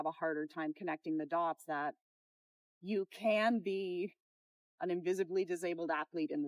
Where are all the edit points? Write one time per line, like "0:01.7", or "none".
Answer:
none